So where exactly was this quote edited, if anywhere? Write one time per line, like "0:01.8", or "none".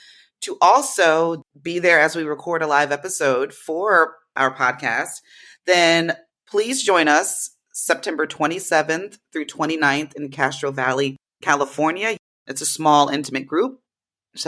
0:01.5
0:12.3